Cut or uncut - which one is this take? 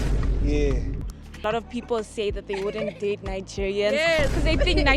cut